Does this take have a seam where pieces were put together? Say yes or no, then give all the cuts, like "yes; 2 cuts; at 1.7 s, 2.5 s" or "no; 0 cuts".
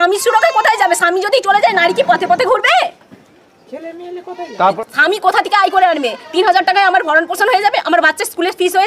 no; 0 cuts